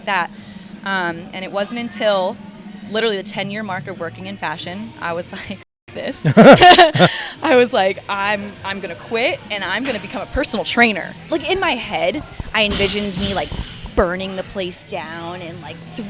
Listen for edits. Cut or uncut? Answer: cut